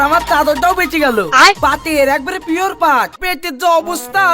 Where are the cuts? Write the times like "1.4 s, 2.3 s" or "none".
3.1 s